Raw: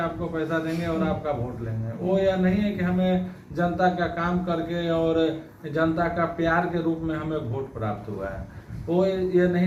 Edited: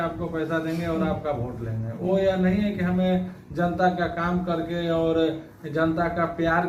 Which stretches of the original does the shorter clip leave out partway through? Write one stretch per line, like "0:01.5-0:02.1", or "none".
none